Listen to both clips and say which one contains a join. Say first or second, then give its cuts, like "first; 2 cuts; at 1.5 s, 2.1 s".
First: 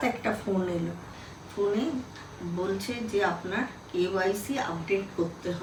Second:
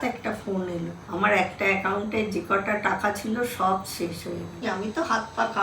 second; 2 cuts; at 1.0 s, 4.6 s